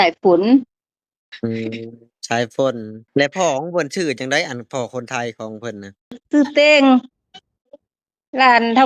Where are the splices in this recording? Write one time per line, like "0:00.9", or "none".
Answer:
0:02.9
0:06.2